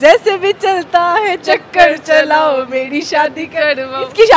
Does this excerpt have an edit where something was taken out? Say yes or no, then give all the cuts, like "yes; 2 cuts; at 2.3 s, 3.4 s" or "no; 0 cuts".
no; 0 cuts